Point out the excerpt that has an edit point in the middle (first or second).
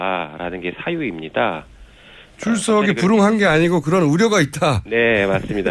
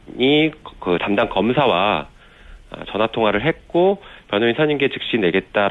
first